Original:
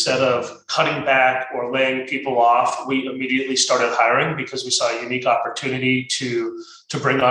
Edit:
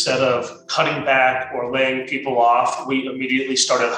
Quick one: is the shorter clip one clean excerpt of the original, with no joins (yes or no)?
yes